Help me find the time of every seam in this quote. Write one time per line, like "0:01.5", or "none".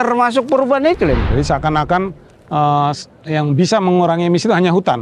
0:01.2